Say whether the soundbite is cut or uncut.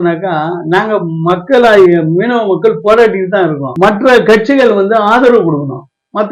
uncut